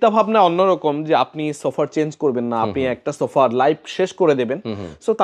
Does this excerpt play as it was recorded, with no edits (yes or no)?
yes